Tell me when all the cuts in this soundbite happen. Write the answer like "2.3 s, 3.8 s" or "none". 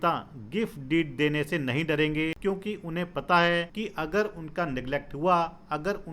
2.4 s, 3.7 s